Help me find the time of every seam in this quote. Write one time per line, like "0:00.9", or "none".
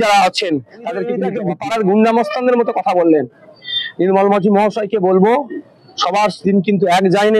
0:01.3